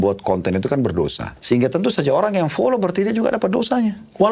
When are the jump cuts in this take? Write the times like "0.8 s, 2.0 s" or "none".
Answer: 1.3 s

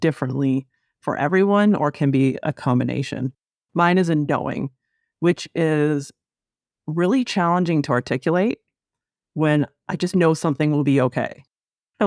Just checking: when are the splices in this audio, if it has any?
none

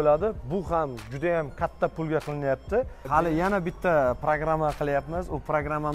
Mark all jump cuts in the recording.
3.0 s

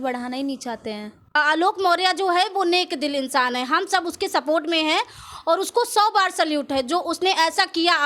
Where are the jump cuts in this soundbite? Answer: 1.3 s

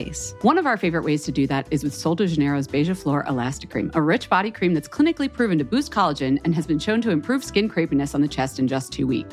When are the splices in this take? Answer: none

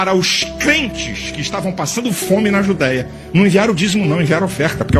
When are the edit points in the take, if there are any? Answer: none

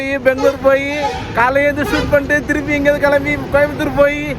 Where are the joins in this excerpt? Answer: none

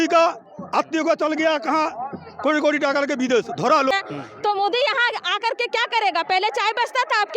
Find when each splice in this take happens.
3.9 s

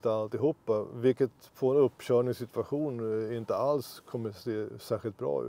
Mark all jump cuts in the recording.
none

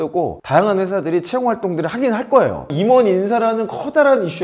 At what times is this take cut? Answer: 2.7 s

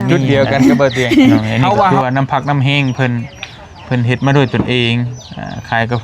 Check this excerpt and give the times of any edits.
1.9 s

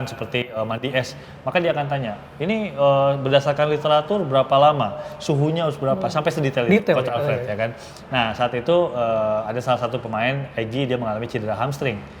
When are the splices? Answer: 7.9 s

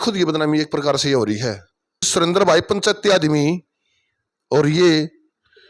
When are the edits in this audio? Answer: 2.1 s

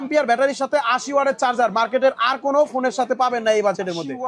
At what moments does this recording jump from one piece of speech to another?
none

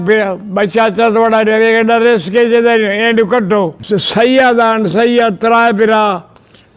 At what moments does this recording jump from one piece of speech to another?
3.8 s

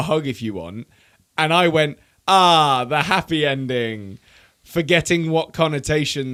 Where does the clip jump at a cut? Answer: none

